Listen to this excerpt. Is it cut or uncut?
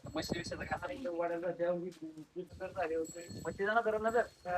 cut